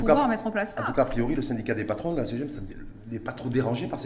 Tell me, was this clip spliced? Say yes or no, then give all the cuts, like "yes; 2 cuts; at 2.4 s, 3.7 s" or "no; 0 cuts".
no; 0 cuts